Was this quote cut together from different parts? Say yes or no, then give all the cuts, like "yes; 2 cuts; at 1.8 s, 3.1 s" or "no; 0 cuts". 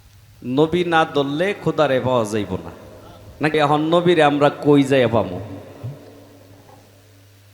yes; 1 cut; at 3.5 s